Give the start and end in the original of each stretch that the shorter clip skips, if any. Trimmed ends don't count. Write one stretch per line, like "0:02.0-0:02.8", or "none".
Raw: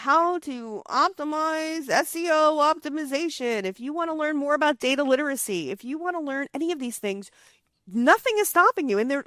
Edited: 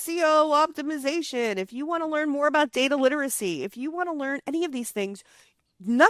none

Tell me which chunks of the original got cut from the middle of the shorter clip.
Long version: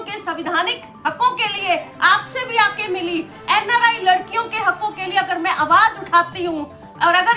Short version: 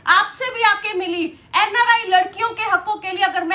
none

